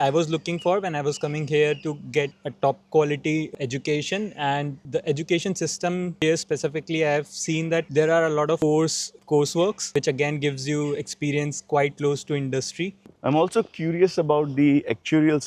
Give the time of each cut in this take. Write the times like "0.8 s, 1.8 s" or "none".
13.0 s